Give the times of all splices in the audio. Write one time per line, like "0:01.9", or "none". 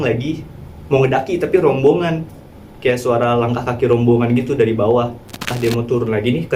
0:05.5